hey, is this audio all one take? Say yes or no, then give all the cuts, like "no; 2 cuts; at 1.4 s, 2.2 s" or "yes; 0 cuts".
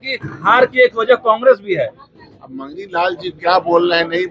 yes; 0 cuts